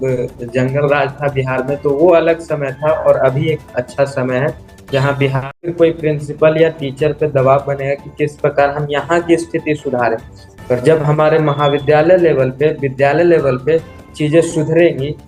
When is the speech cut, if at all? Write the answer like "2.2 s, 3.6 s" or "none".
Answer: 5.6 s